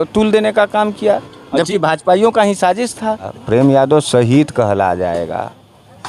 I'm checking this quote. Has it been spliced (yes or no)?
yes